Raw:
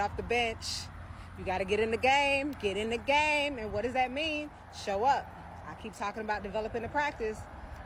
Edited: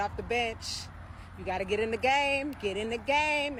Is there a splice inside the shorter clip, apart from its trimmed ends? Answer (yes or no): no